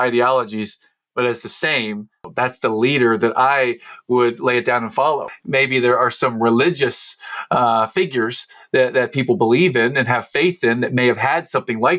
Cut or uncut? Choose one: cut